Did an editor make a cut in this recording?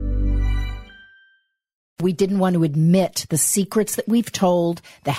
yes; 1 cut; at 2.0 s

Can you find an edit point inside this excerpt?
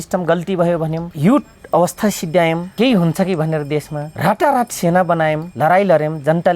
yes; 4 cuts; at 1.1 s, 2.7 s, 4.0 s, 5.5 s

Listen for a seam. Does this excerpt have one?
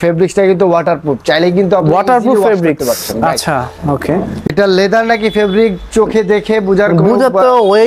yes; 1 cut; at 4.5 s

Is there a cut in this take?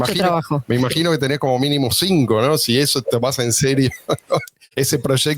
no; 0 cuts

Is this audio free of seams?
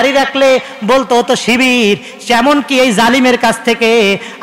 yes; 0 cuts

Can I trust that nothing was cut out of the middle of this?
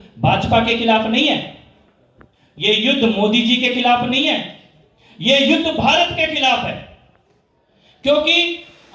yes; 0 cuts

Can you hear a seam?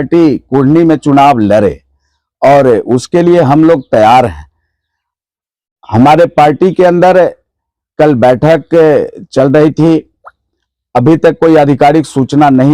no; 0 cuts

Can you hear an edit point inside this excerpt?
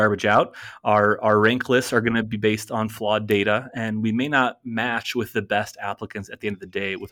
no; 0 cuts

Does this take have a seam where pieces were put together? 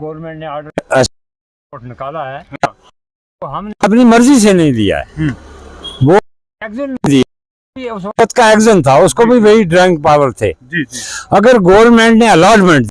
no; 0 cuts

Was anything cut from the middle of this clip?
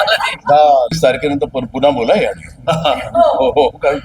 yes; 1 cut; at 1.0 s

